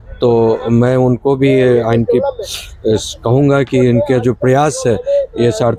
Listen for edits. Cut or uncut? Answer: uncut